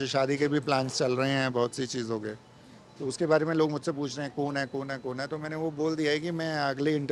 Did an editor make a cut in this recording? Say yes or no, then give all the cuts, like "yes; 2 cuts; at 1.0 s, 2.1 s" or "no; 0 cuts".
no; 0 cuts